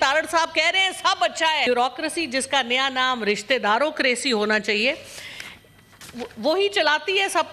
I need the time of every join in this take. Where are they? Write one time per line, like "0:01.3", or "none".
0:01.7

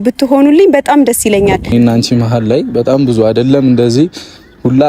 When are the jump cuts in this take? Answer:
0:01.7

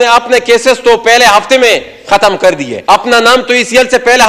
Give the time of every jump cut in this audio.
0:02.7

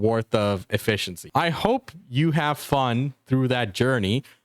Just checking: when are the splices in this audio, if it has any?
0:01.2

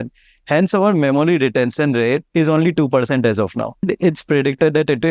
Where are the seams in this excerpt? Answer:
0:02.3
0:03.9

